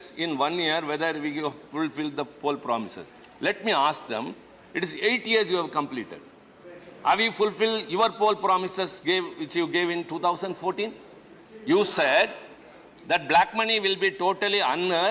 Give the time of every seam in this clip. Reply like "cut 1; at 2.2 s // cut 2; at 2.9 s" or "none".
none